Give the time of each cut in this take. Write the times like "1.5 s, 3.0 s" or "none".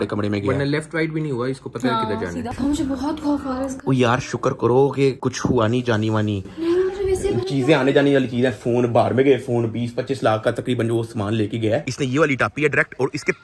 2.5 s, 11.8 s